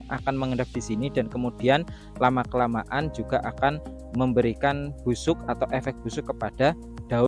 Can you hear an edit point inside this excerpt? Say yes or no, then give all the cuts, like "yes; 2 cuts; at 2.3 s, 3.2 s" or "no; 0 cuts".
no; 0 cuts